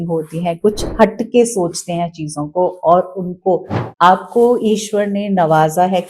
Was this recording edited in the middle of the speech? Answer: yes; 1 cut; at 3.8 s

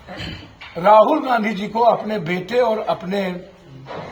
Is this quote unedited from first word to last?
yes; 0 cuts

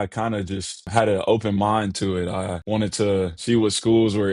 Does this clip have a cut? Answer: yes; 3 cuts; at 0.8 s, 2.6 s, 3.4 s

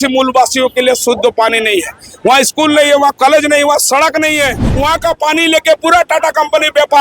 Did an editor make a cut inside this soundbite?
yes; 1 cut; at 4.6 s

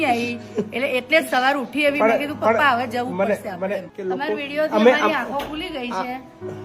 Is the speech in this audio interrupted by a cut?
yes; 1 cut; at 3.8 s

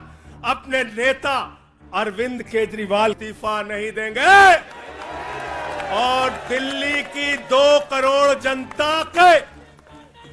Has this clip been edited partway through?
yes; 1 cut; at 3.3 s

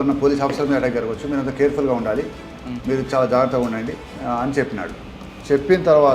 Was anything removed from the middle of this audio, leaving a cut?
yes; 1 cut; at 4.1 s

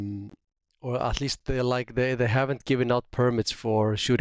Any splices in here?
no; 0 cuts

